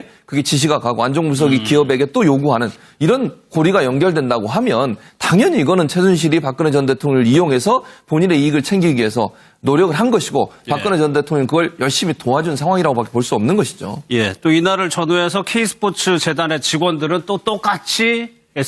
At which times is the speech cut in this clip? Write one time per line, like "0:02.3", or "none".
none